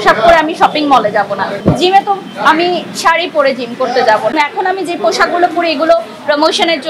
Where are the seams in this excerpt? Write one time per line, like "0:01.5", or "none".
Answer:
0:01.5
0:04.3